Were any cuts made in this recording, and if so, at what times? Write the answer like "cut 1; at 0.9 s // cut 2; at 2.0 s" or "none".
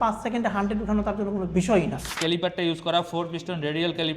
cut 1; at 2.0 s